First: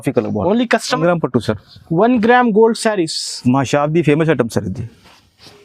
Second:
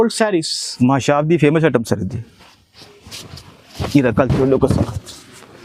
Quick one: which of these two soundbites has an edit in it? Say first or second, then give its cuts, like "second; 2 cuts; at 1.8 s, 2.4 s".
first; 1 cut; at 1.0 s